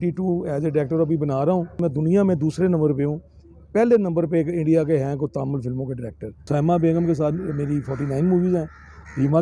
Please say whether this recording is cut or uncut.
cut